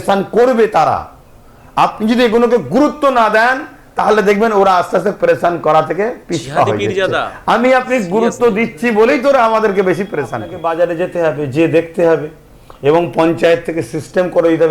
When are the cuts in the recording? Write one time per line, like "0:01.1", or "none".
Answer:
0:10.6